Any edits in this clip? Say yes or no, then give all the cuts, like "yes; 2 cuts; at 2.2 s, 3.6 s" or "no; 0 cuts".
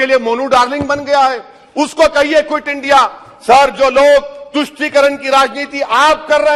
no; 0 cuts